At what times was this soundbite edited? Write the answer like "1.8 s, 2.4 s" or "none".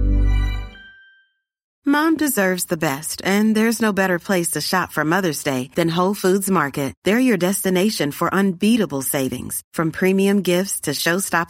1.7 s